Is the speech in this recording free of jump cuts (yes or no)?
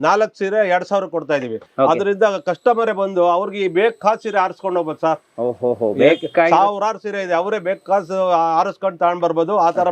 yes